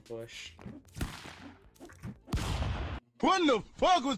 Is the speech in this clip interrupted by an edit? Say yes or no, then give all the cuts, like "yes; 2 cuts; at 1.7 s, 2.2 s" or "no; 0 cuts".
yes; 1 cut; at 3.2 s